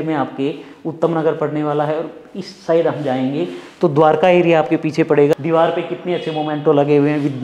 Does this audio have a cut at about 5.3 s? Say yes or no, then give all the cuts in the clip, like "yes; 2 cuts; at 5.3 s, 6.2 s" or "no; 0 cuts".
yes; 1 cut; at 5.3 s